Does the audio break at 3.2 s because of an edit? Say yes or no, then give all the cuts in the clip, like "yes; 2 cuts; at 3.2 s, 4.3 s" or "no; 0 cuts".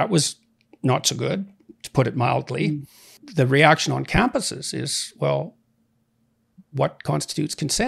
yes; 1 cut; at 3.2 s